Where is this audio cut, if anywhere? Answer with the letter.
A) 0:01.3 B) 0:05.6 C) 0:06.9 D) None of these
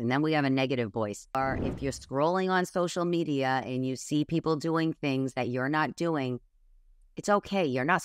A